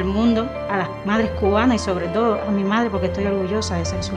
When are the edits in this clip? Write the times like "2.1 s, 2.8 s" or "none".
none

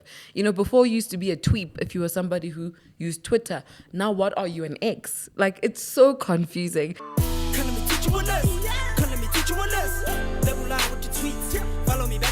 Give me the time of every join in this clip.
7.0 s

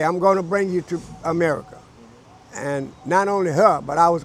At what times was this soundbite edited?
none

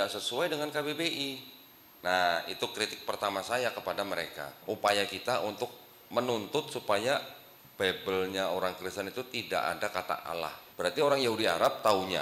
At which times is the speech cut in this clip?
4.6 s, 10.6 s

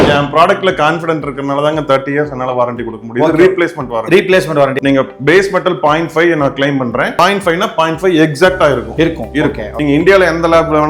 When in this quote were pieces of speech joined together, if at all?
4.8 s, 9.7 s

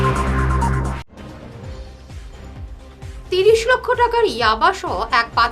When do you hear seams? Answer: 2.8 s

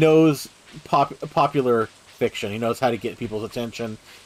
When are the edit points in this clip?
none

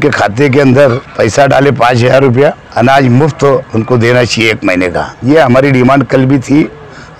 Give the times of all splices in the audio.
1.1 s, 2.6 s, 3.7 s, 5.1 s

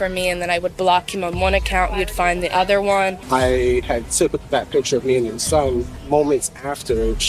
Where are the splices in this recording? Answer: 3.2 s, 3.8 s, 5.9 s

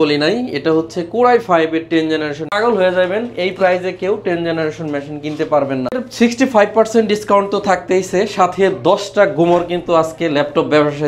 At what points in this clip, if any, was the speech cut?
2.5 s, 6.1 s

